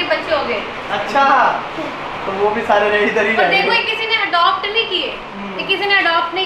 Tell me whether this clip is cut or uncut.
uncut